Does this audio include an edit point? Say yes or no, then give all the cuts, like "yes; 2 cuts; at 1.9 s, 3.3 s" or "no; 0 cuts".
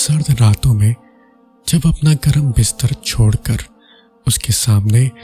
no; 0 cuts